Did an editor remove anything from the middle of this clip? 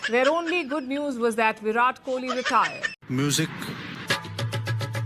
no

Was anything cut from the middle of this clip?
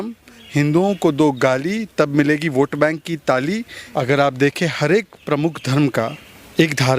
yes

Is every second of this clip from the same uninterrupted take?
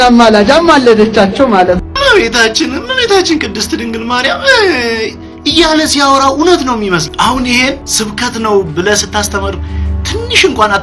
no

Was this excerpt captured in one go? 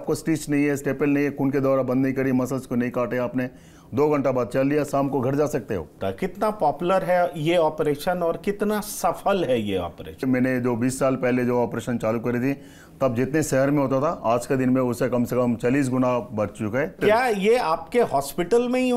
no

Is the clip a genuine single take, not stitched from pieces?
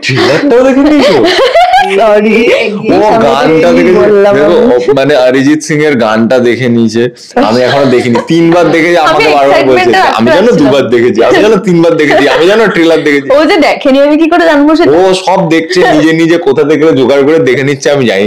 yes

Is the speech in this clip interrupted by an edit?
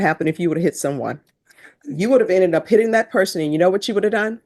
no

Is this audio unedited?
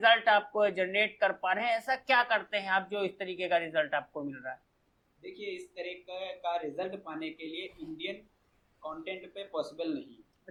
yes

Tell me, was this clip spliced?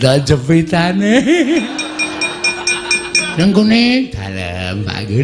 yes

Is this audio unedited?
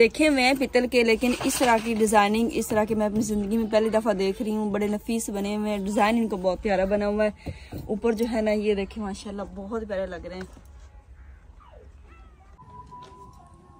no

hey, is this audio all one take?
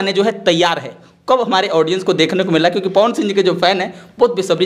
yes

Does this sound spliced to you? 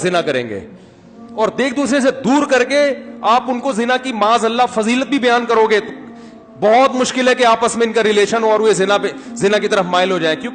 no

